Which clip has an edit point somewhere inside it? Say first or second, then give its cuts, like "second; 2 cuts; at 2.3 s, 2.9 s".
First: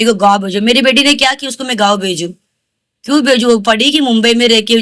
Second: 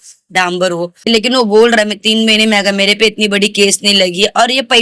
second; 1 cut; at 1.0 s